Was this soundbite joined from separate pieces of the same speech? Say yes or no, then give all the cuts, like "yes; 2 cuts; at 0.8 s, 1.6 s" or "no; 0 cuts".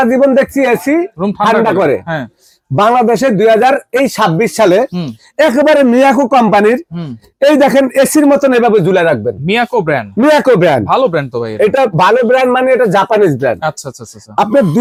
no; 0 cuts